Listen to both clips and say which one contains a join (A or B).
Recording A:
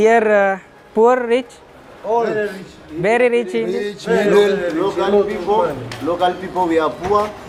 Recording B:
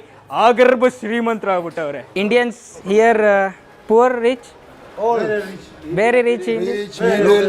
B